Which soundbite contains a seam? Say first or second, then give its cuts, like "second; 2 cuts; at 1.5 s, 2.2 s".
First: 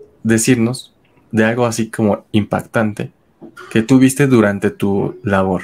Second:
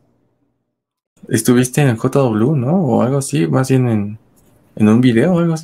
second; 1 cut; at 1.0 s